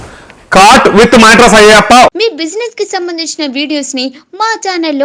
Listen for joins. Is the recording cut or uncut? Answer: cut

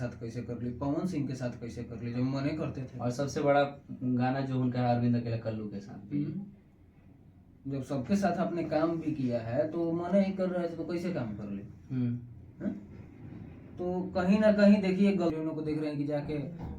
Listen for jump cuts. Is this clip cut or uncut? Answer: cut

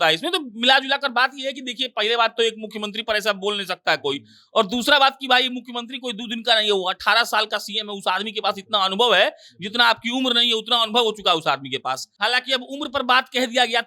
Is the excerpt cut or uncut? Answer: cut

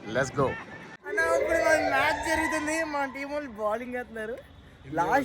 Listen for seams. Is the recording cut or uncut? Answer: cut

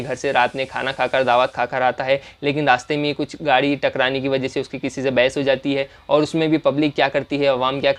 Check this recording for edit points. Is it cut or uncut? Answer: uncut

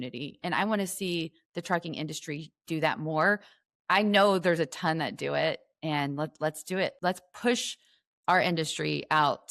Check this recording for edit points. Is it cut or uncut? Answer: cut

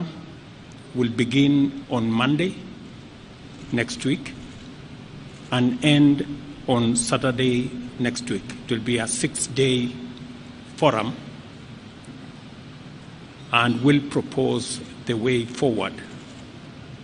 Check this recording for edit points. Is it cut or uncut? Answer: uncut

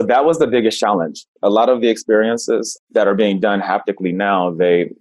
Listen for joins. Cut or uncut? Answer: cut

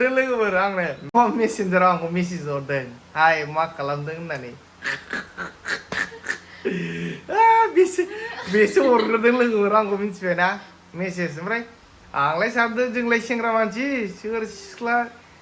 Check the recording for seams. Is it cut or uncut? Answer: cut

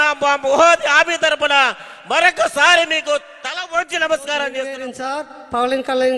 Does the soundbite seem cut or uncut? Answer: cut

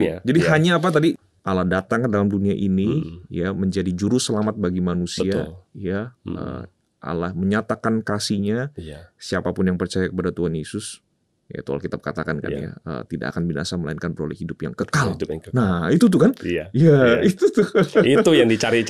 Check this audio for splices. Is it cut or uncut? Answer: cut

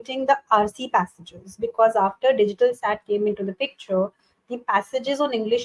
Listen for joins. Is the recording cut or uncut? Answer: uncut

